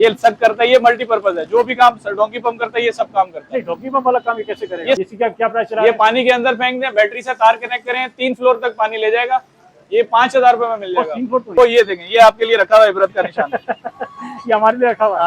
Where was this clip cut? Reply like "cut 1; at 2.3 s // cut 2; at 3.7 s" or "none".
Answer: cut 1; at 5.0 s // cut 2; at 11.5 s